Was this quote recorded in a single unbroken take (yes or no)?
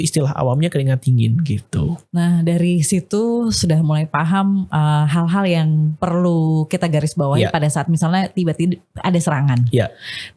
yes